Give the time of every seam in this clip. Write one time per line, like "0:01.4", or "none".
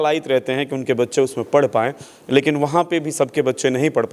none